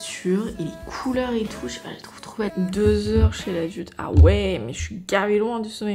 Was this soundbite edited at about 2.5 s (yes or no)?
yes